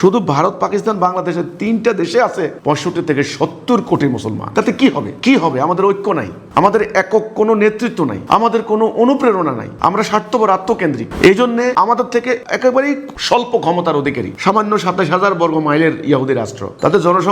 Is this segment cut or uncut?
cut